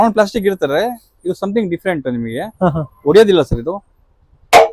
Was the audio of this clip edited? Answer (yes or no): no